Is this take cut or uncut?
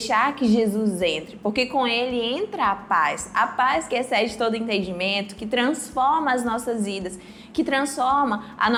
uncut